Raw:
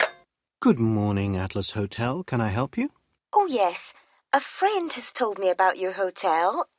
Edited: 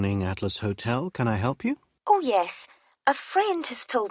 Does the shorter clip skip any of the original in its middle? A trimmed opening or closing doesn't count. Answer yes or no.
yes